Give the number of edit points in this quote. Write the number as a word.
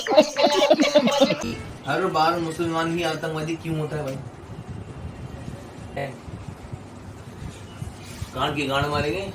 two